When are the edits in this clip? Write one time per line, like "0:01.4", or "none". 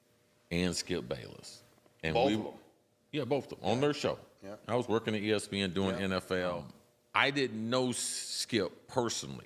0:06.6